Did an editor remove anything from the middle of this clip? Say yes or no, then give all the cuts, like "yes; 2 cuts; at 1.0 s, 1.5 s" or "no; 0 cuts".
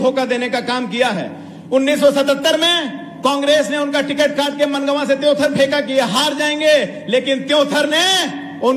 no; 0 cuts